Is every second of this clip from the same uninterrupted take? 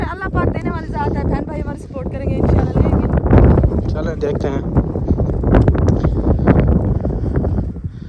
yes; 0 cuts

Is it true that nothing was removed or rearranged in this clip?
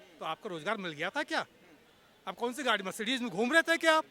yes; 0 cuts

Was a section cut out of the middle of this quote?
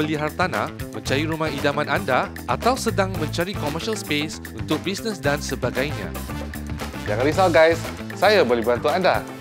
no; 0 cuts

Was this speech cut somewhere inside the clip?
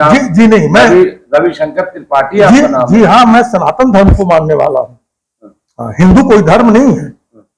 no; 0 cuts

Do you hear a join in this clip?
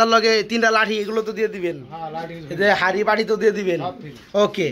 no; 0 cuts

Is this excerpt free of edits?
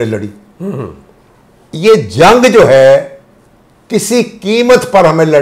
yes; 0 cuts

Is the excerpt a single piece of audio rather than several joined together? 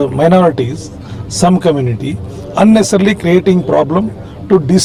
yes; 0 cuts

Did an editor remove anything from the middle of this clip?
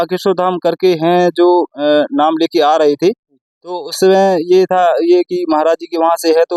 no; 0 cuts

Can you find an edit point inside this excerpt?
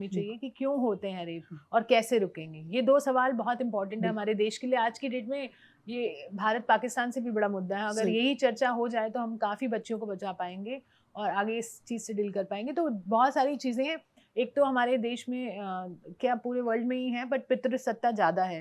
no; 0 cuts

